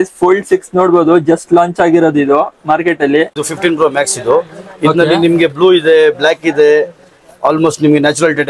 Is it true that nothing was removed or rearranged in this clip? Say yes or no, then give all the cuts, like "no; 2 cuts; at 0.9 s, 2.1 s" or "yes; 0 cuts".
no; 1 cut; at 3.4 s